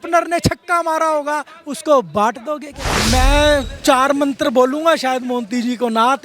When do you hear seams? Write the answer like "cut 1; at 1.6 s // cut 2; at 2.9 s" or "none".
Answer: cut 1; at 3.0 s